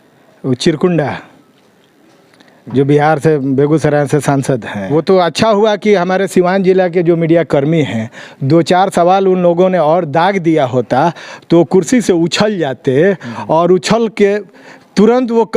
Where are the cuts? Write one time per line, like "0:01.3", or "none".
0:04.9